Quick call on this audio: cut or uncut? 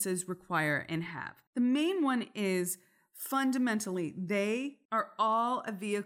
cut